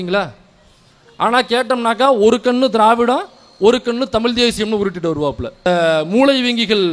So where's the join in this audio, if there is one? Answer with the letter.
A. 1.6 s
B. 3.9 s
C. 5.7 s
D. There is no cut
C